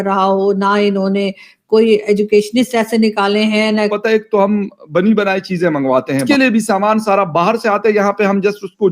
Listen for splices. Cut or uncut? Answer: cut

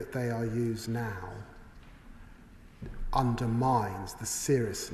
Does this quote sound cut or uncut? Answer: uncut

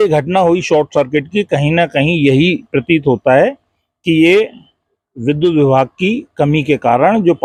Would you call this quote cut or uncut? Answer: uncut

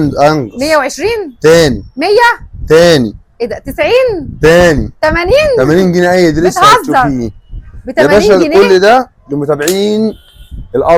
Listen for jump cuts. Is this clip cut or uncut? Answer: uncut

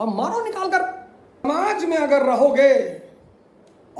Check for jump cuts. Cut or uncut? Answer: cut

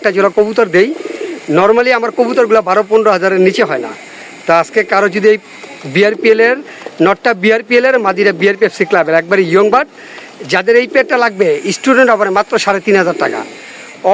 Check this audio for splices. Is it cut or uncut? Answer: uncut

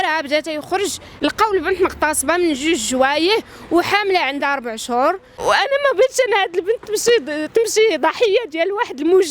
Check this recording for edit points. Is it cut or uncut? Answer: cut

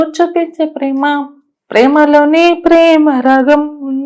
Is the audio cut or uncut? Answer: uncut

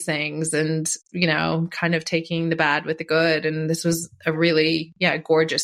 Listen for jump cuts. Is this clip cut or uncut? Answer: uncut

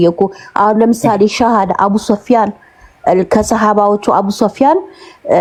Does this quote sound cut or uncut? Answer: uncut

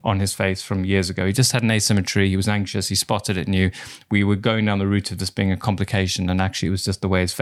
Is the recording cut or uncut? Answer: uncut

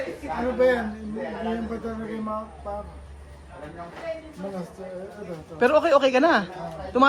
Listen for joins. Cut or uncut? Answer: uncut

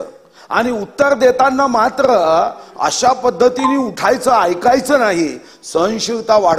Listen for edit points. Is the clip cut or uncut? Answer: uncut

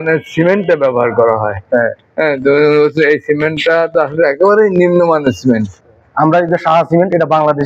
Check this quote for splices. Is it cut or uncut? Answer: cut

